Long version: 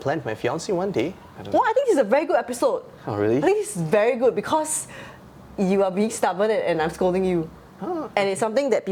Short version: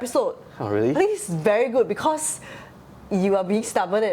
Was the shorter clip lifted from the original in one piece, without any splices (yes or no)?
yes